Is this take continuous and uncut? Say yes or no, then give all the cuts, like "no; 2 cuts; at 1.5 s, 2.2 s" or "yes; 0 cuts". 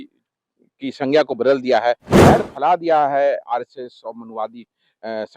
no; 1 cut; at 2.2 s